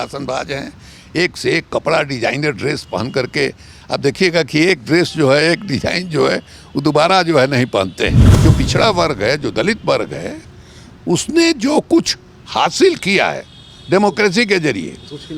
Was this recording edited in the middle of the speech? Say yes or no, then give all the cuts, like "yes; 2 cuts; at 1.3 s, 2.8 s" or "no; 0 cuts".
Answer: yes; 1 cut; at 8.3 s